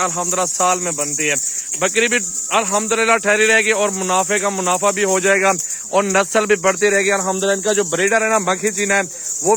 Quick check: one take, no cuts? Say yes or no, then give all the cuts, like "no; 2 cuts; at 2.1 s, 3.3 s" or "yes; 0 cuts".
yes; 0 cuts